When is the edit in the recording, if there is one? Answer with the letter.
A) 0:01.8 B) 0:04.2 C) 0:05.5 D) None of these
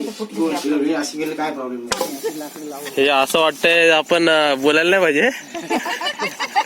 A